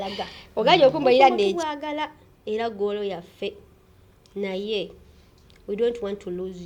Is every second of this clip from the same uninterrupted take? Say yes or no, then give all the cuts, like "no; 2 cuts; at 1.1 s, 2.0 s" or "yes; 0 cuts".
no; 1 cut; at 1.5 s